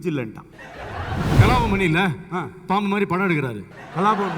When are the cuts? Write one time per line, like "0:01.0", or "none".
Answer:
0:01.4